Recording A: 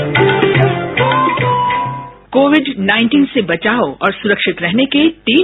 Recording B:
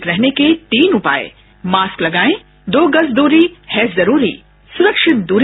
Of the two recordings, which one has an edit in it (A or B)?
A